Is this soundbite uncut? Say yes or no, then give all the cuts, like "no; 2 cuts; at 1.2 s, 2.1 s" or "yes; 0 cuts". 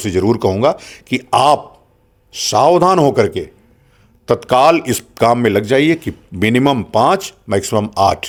yes; 0 cuts